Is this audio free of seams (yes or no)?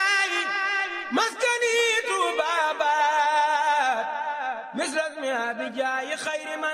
yes